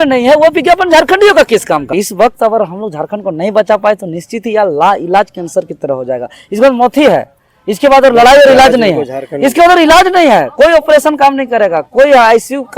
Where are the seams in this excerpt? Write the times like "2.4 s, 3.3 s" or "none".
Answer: 1.9 s